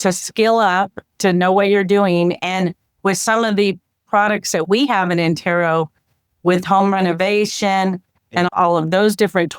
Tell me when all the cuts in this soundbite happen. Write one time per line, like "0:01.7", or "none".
none

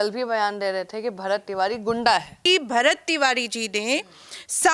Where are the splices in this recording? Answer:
0:02.4

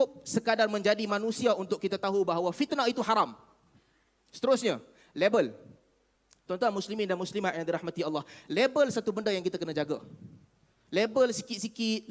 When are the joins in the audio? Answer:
none

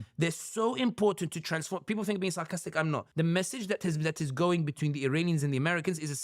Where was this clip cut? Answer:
0:03.1

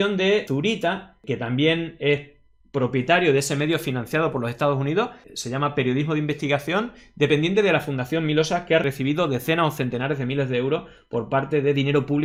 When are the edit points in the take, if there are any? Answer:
none

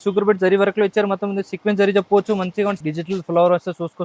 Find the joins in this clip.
0:02.8

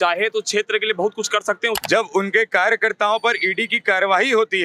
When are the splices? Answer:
0:01.8

